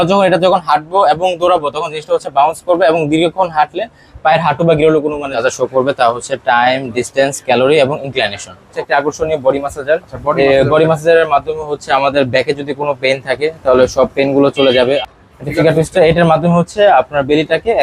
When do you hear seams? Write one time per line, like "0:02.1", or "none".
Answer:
0:05.4
0:08.8
0:15.0